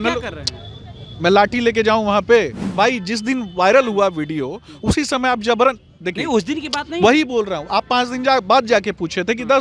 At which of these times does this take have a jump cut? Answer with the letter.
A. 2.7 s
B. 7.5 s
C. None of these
A